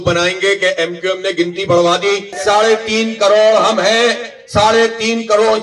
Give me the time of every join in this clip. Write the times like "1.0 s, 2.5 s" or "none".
2.4 s